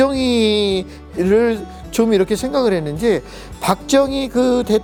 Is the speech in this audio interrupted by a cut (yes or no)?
no